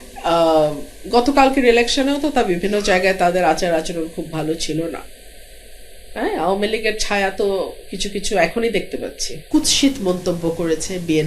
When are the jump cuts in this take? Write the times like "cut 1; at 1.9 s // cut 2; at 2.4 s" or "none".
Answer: cut 1; at 9.4 s